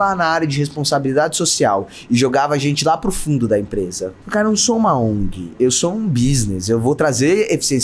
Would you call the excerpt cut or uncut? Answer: uncut